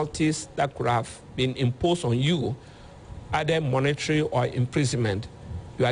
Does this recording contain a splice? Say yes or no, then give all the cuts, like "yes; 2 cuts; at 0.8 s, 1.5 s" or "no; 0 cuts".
no; 0 cuts